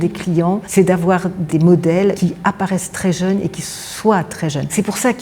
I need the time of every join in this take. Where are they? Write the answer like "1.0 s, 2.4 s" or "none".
1.4 s, 2.2 s